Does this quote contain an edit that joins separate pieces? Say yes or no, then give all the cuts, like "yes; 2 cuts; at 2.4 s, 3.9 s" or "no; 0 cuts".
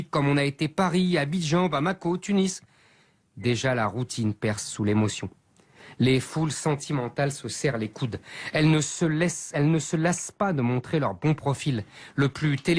no; 0 cuts